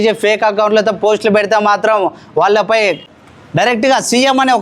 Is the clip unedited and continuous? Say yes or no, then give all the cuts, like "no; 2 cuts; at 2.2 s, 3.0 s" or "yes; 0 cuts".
no; 1 cut; at 3.1 s